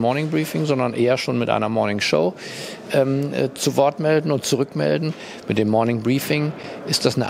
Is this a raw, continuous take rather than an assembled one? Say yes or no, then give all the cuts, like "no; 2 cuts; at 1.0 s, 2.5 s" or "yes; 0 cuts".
yes; 0 cuts